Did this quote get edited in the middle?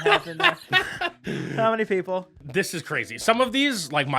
yes; 1 cut; at 2.3 s

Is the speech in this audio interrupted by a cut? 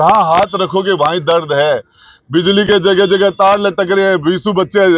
no; 0 cuts

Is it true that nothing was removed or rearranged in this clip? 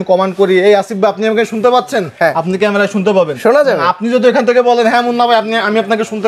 yes; 0 cuts

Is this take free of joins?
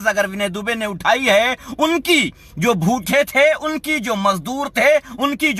yes; 0 cuts

